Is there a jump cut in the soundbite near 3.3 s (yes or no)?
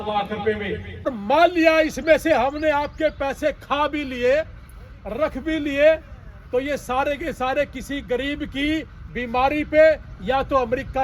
no